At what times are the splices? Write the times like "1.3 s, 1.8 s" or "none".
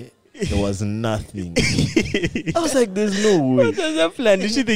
2.4 s